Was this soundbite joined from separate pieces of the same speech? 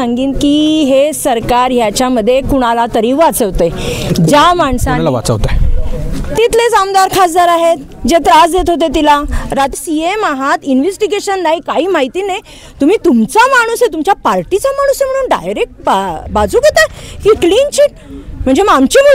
yes; 1 cut; at 9.7 s

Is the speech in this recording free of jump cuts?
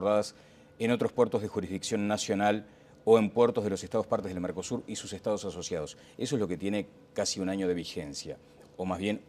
yes; 0 cuts

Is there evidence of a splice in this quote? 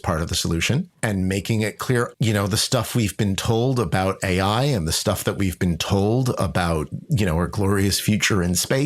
yes; 2 cuts; at 0.9 s, 2.1 s

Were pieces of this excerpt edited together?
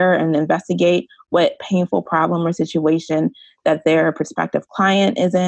no; 0 cuts

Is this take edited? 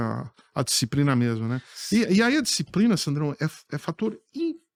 no; 0 cuts

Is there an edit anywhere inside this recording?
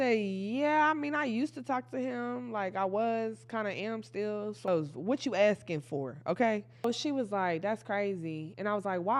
yes; 2 cuts; at 4.7 s, 6.8 s

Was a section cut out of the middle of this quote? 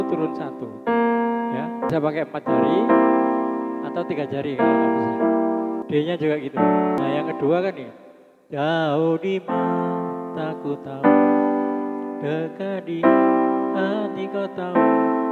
yes; 2 cuts; at 1.9 s, 7.0 s

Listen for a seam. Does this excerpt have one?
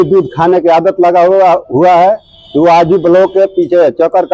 no; 0 cuts

